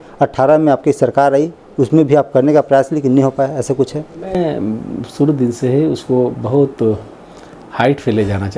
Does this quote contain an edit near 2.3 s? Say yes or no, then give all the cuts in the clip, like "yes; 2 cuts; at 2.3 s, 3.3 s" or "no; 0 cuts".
no; 0 cuts